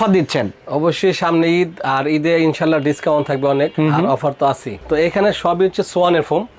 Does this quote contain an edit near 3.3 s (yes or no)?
no